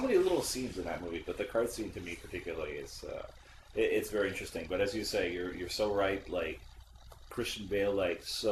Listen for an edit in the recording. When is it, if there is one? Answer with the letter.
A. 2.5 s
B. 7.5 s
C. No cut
C